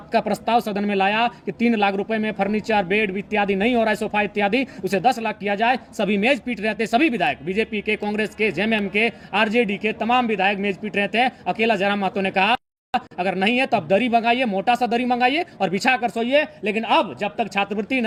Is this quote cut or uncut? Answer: uncut